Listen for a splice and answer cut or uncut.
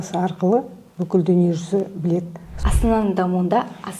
cut